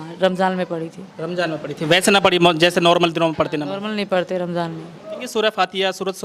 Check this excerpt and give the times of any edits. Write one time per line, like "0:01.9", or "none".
0:05.2